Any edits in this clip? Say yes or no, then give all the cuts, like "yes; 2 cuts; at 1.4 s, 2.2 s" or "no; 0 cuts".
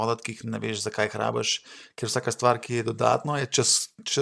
no; 0 cuts